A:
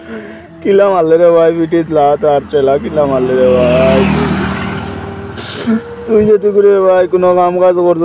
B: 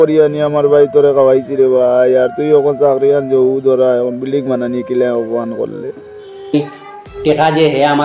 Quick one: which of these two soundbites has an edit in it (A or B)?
B